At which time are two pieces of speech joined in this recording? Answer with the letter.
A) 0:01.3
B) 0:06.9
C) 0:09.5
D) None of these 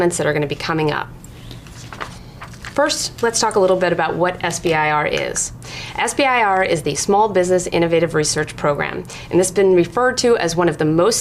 C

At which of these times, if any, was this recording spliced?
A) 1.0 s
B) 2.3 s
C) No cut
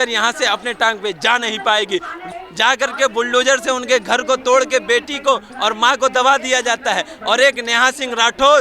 B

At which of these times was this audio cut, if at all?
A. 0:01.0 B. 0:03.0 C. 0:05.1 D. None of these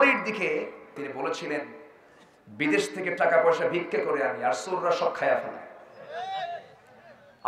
A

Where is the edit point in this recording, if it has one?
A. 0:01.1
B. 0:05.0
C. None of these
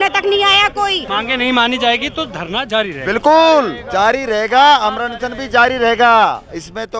A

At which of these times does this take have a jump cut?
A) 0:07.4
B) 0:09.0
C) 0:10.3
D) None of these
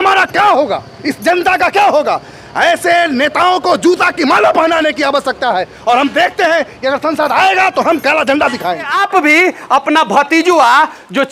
B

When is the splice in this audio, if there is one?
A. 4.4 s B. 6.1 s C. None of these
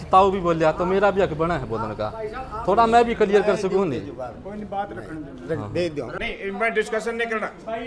B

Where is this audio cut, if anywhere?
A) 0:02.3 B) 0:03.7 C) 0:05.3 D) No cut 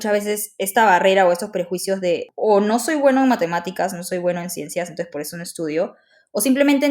A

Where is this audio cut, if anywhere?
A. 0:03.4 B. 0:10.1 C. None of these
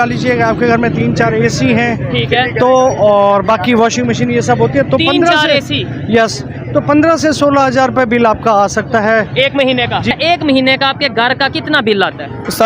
B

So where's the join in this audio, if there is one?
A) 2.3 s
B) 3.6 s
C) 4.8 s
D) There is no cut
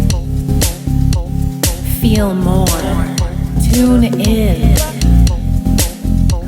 B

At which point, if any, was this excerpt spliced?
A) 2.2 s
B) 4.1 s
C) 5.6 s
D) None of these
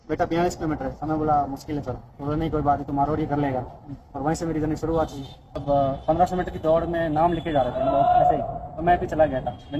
C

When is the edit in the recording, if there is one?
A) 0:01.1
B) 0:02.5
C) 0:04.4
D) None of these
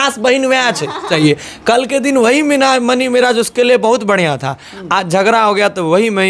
A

